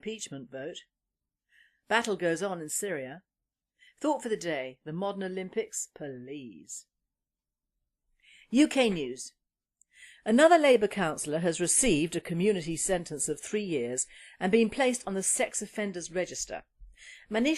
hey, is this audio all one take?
no; 1 cut; at 1.6 s

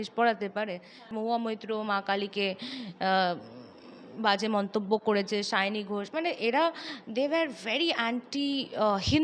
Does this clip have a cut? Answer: yes; 1 cut; at 1.1 s

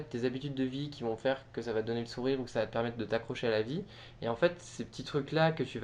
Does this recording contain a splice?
no; 0 cuts

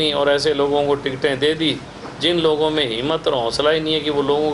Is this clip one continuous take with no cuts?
yes; 0 cuts

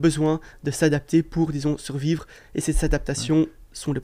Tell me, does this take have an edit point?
no; 0 cuts

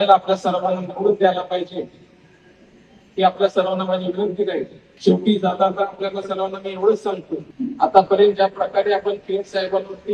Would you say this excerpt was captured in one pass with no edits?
no; 2 cuts; at 4.8 s, 7.5 s

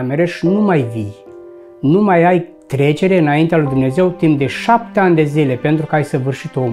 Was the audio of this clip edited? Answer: no; 0 cuts

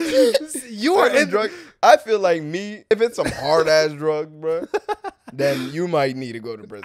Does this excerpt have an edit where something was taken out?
yes; 1 cut; at 2.9 s

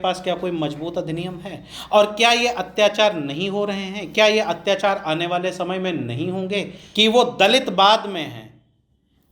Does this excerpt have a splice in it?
yes; 1 cut; at 6.8 s

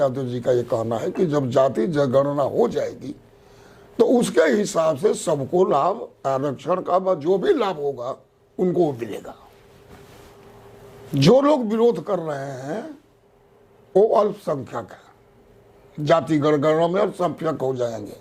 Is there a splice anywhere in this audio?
no; 0 cuts

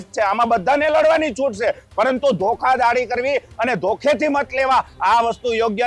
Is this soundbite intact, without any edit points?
yes; 0 cuts

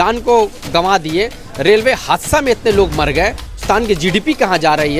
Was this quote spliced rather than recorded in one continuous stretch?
yes; 1 cut; at 3.6 s

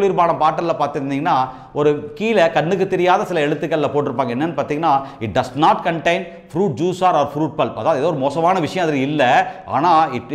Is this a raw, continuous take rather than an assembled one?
yes; 0 cuts

